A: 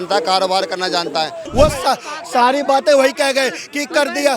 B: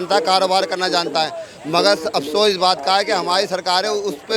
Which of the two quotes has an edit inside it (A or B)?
A